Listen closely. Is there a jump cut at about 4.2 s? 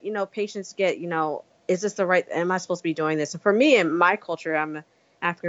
no; 1 cut; at 1.5 s

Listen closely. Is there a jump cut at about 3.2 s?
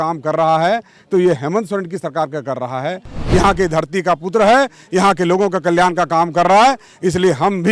yes; 1 cut; at 3.2 s

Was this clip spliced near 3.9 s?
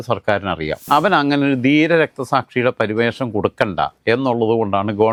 no; 0 cuts

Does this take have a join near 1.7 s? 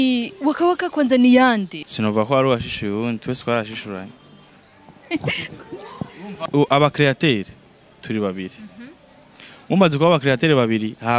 yes; 2 cuts; at 1.7 s, 6.5 s

